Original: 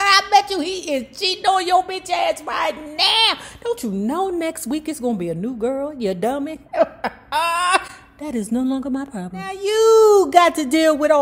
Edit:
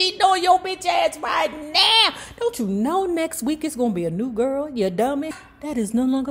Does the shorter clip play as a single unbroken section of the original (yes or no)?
no